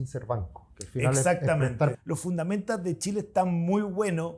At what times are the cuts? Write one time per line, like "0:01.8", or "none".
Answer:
0:02.0